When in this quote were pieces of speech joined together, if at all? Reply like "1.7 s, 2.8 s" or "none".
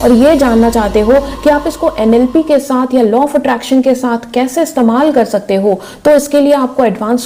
none